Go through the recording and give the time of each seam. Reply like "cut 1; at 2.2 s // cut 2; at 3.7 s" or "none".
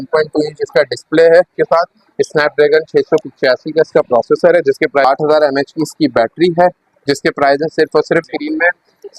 cut 1; at 1.6 s // cut 2; at 5.0 s // cut 3; at 8.3 s